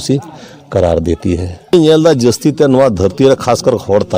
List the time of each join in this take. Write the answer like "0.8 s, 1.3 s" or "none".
1.7 s